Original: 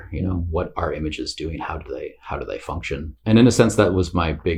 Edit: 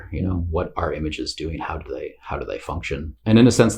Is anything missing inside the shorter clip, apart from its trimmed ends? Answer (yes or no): no